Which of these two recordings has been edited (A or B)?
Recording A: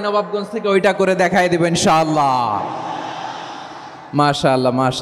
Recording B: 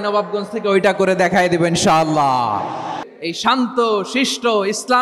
B